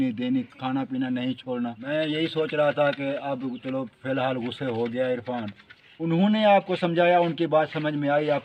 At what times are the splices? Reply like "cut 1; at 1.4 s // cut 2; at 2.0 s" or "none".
cut 1; at 1.8 s // cut 2; at 6.2 s